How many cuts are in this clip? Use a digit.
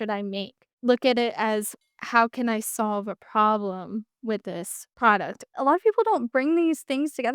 1